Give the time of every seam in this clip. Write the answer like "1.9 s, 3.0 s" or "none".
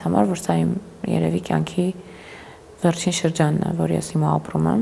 none